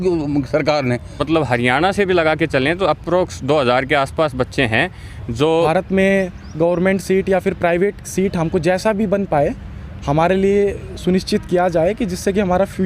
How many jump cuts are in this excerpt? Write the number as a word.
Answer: two